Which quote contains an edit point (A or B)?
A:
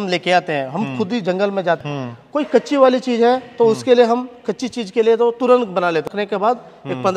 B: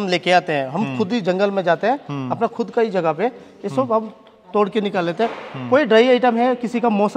A